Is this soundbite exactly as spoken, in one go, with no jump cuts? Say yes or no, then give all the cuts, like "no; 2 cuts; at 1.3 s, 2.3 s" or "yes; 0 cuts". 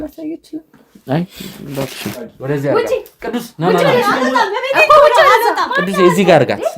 no; 1 cut; at 2.2 s